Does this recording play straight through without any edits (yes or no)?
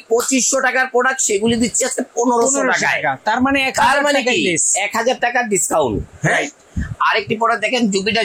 yes